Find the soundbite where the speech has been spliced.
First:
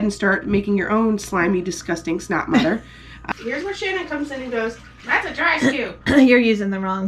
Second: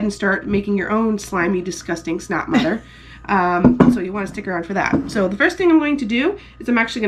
first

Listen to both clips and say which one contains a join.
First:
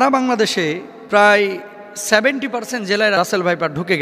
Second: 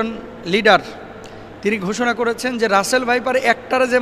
first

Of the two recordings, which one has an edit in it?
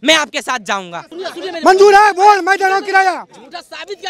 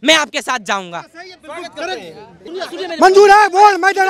first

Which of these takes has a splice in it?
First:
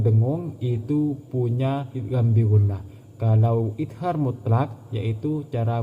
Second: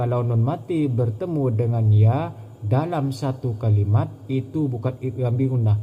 first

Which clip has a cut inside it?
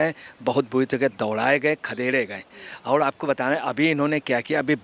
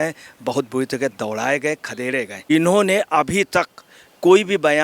second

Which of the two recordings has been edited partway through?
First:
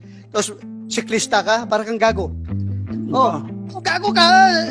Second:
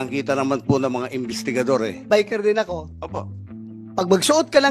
second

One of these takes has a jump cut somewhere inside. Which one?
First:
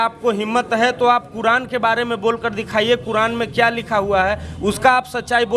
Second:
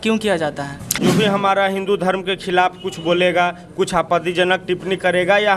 second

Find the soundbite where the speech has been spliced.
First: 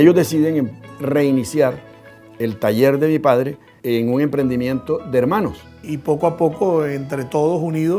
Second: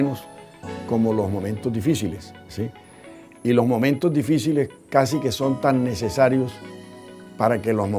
first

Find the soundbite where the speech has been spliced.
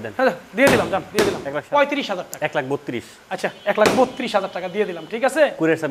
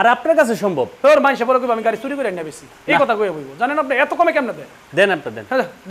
first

